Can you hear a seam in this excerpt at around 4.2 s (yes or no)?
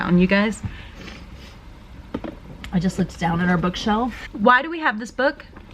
yes